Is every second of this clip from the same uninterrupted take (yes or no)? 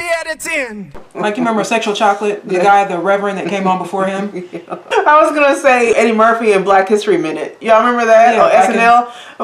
no